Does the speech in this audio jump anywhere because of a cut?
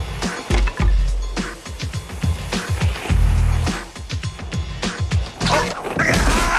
no; 0 cuts

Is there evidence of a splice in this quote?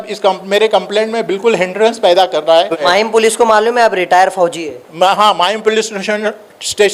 yes; 1 cut; at 2.8 s

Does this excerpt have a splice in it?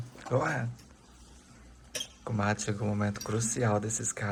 no; 0 cuts

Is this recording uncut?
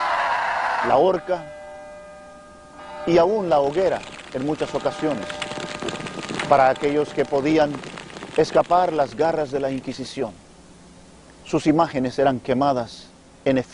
no; 1 cut; at 3.7 s

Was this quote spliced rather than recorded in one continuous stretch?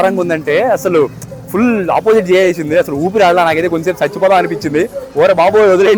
no; 0 cuts

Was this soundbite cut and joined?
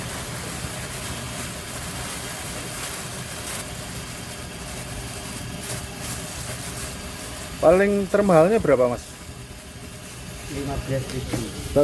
no; 0 cuts

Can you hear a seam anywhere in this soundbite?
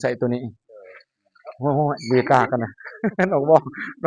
no; 0 cuts

